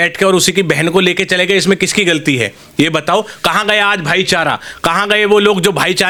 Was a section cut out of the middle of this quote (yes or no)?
no